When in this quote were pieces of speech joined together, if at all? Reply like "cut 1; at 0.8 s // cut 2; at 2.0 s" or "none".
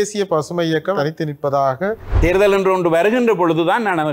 cut 1; at 1.0 s // cut 2; at 2.1 s

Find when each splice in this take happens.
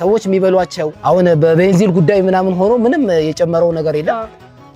cut 1; at 0.9 s

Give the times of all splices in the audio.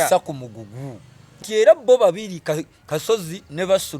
cut 1; at 1.4 s

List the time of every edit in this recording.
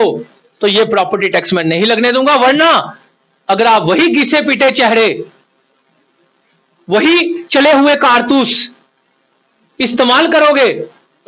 none

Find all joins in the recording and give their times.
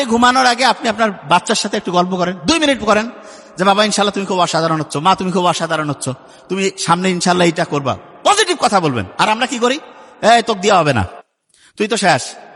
none

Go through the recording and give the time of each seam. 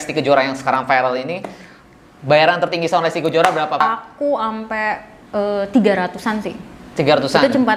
none

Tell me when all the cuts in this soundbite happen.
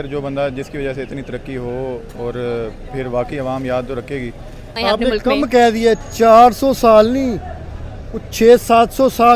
cut 1; at 4.7 s

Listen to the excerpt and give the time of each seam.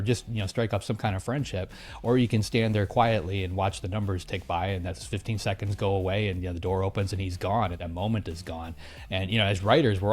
cut 1; at 7.8 s

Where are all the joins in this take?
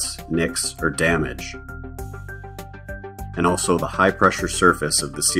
cut 1; at 1.3 s // cut 2; at 3.4 s

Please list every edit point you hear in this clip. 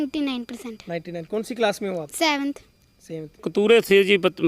cut 1; at 3.5 s

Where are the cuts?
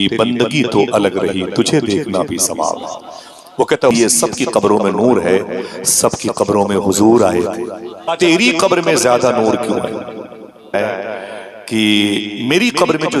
cut 1; at 3.9 s // cut 2; at 8.1 s // cut 3; at 10.7 s

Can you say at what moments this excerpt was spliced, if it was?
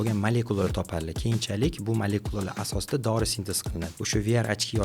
cut 1; at 3.9 s

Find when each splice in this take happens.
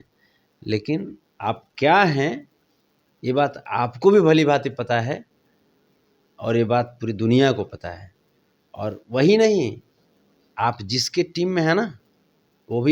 none

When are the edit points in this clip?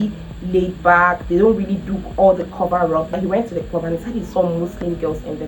cut 1; at 3.2 s

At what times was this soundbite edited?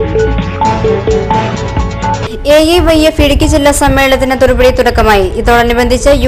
none

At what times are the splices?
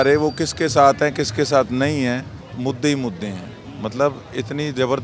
cut 1; at 2.4 s

